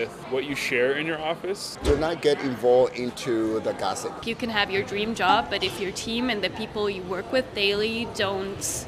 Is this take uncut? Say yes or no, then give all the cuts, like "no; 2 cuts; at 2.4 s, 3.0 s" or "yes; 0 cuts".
no; 2 cuts; at 1.7 s, 4.2 s